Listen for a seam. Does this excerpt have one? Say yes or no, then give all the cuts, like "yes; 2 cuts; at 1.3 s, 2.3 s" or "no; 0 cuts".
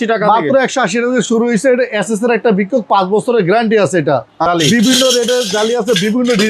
yes; 1 cut; at 4.5 s